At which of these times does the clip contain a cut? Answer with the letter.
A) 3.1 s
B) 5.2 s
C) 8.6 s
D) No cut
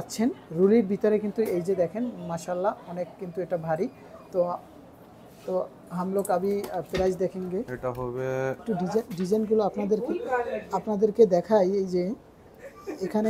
C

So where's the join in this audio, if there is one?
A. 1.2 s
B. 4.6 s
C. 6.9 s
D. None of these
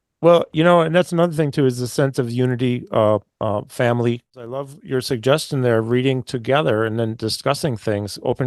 B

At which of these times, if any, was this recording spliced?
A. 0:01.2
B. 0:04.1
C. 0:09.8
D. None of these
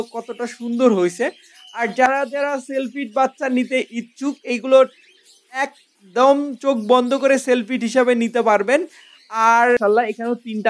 C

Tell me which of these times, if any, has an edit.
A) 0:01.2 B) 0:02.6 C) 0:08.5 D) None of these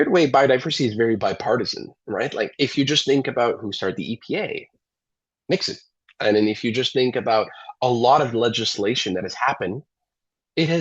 A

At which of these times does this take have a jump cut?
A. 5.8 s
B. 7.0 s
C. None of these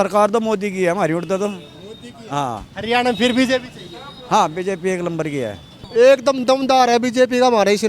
A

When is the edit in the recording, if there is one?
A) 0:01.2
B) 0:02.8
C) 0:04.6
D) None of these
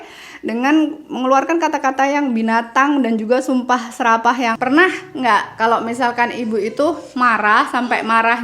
C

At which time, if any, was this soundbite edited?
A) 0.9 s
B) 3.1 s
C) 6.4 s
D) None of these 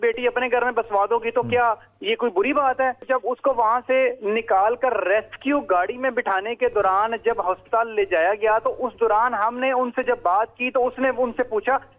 B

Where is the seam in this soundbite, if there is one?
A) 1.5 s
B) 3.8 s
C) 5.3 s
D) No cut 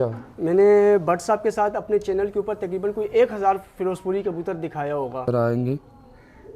C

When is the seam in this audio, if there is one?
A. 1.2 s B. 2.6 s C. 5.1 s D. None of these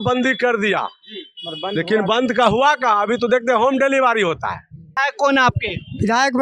C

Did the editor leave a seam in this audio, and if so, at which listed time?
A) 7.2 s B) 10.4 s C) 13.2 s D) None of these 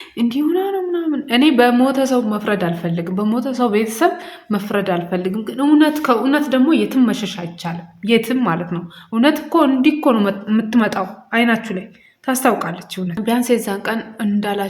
C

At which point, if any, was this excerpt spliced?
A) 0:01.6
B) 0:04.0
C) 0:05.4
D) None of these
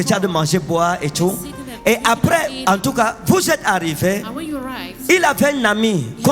D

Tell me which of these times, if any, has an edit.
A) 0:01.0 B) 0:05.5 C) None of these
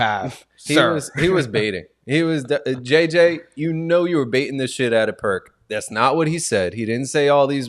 C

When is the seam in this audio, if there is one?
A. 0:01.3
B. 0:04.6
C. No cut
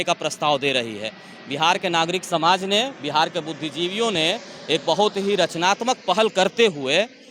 C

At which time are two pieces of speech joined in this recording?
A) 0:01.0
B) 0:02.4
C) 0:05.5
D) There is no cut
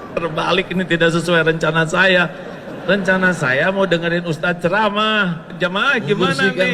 C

